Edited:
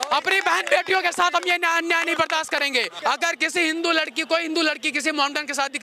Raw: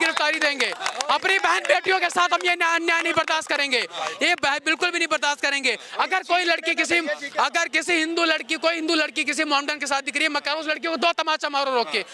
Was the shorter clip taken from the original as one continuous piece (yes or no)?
no